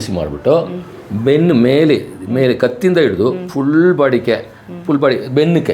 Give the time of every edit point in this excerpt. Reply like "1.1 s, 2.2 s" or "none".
none